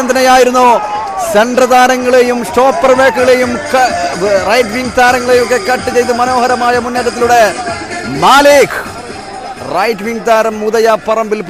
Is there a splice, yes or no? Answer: no